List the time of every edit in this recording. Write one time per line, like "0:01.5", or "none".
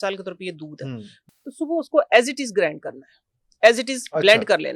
0:01.2